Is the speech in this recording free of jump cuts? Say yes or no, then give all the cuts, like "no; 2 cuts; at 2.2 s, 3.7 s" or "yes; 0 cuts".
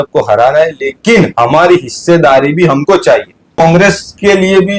no; 1 cut; at 3.6 s